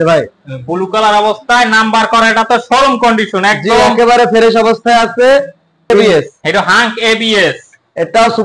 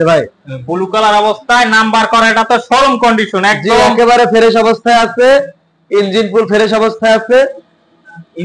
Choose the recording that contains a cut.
first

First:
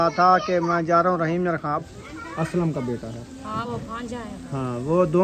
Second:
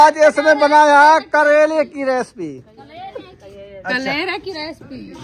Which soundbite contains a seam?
first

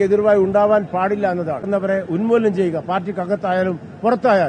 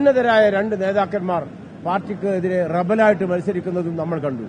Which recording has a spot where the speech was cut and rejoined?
first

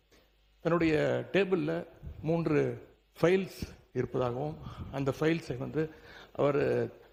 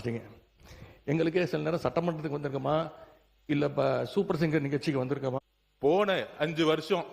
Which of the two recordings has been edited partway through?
second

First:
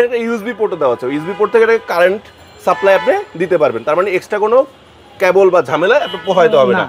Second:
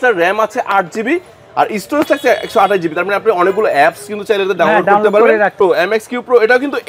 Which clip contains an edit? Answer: second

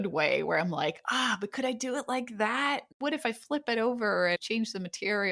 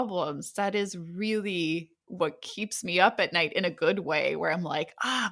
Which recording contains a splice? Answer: first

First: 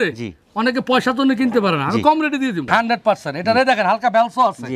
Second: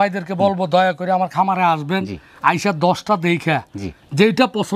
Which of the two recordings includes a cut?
first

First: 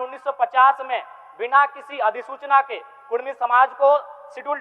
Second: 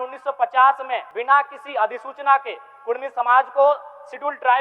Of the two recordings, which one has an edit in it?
second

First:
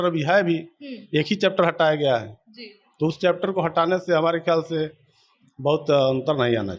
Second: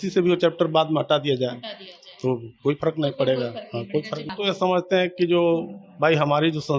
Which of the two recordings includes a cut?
second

